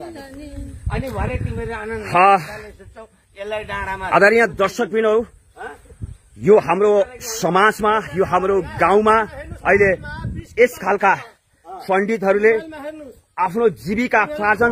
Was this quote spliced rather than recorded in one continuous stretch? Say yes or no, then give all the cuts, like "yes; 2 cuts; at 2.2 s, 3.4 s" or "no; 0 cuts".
no; 0 cuts